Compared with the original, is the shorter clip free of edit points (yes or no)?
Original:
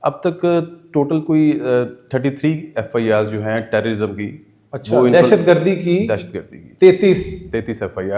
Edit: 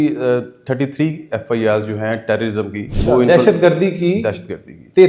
no